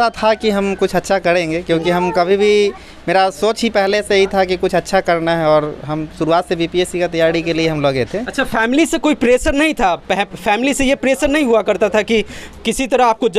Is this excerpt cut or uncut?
uncut